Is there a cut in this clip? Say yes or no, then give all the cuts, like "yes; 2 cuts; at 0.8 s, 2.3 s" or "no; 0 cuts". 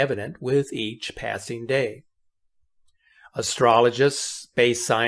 yes; 1 cut; at 1.9 s